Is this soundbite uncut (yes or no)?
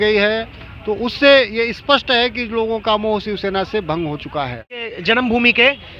no